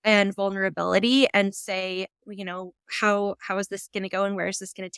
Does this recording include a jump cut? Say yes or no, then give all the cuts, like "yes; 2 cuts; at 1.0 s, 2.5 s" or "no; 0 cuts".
no; 0 cuts